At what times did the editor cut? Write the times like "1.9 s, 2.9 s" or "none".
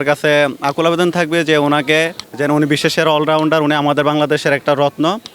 2.2 s

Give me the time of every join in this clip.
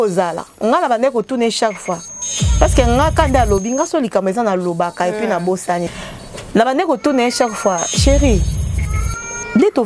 5.9 s

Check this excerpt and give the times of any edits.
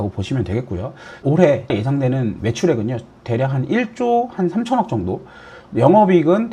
1.1 s, 1.9 s

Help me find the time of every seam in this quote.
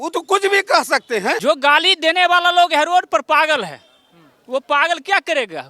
1.4 s

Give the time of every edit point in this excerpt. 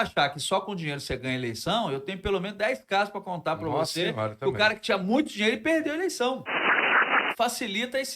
6.9 s

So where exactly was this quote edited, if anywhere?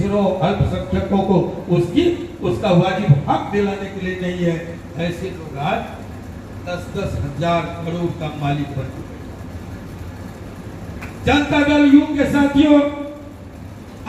none

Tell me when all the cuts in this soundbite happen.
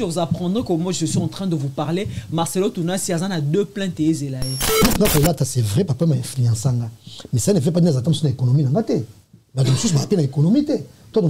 4.8 s

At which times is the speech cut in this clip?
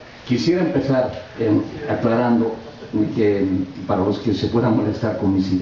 none

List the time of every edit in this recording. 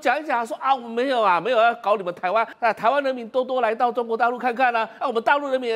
2.5 s

